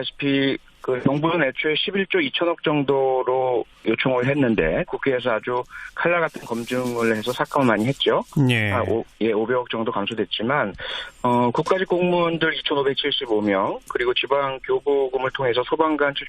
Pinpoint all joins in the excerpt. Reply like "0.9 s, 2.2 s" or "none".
13.3 s